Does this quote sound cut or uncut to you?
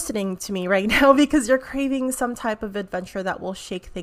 uncut